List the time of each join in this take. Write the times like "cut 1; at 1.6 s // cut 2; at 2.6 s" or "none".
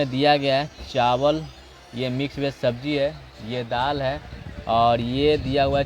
none